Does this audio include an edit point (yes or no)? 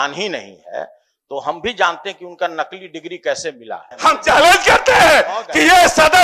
yes